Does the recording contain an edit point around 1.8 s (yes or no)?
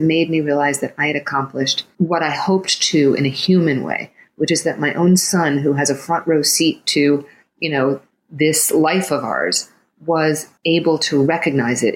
yes